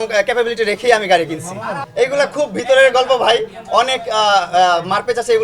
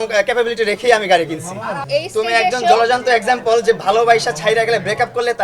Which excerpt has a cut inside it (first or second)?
first